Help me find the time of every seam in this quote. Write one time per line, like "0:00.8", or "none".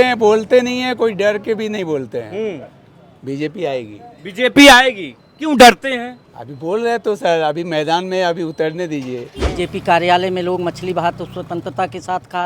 0:09.4